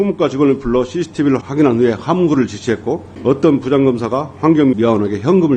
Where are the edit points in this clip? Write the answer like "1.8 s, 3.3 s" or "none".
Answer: 1.4 s, 3.1 s, 4.7 s